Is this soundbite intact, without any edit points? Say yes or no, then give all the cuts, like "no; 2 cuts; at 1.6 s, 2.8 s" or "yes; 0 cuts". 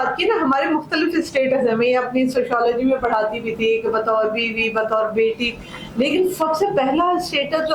yes; 0 cuts